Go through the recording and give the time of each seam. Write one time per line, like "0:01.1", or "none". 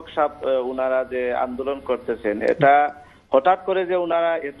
none